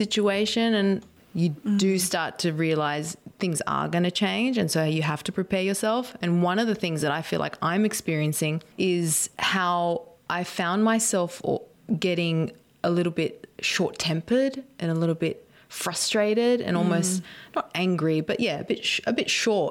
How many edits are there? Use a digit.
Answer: 3